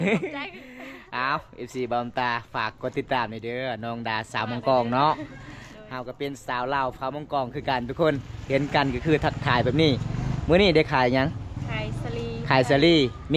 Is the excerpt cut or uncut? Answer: uncut